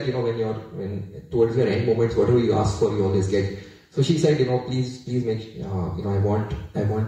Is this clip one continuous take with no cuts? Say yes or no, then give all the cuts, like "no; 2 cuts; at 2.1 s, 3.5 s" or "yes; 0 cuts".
yes; 0 cuts